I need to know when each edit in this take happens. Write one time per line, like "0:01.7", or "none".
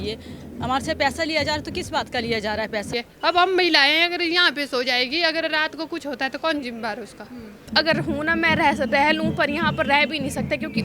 0:02.9
0:07.6